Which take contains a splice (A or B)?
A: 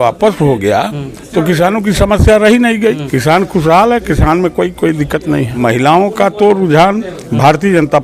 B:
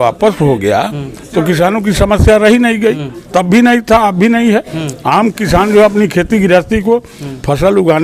A